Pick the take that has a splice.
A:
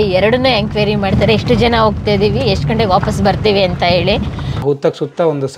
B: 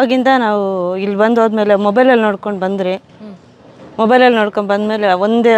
A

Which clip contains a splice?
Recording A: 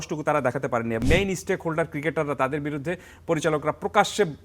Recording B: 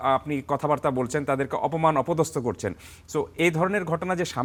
A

